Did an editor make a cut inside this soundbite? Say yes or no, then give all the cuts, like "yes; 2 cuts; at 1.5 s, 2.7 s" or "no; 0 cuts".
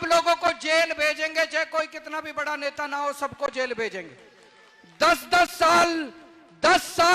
no; 0 cuts